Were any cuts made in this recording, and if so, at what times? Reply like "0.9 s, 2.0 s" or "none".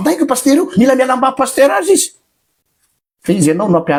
none